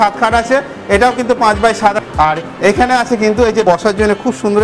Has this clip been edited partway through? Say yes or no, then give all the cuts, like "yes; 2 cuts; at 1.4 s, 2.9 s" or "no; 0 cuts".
yes; 2 cuts; at 2.0 s, 3.6 s